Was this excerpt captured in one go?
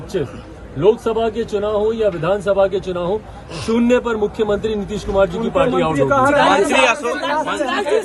yes; 0 cuts

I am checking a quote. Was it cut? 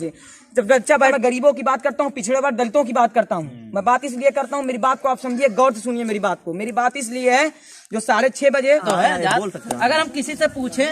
yes; 2 cuts; at 1.1 s, 8.8 s

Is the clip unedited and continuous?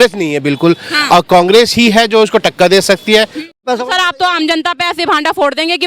no; 1 cut; at 3.6 s

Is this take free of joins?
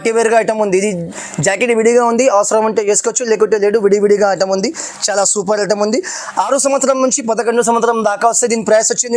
yes; 0 cuts

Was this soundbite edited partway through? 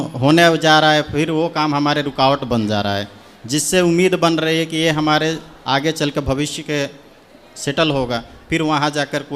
no; 0 cuts

